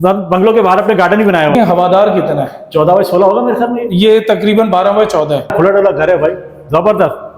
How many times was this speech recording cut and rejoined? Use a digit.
2